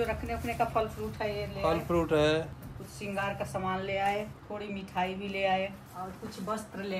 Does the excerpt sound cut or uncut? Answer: cut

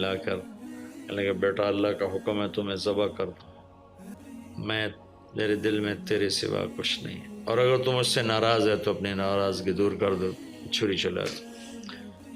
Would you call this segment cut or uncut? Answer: cut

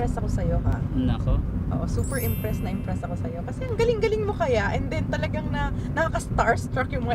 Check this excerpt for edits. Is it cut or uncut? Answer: uncut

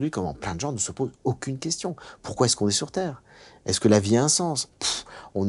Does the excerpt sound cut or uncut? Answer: uncut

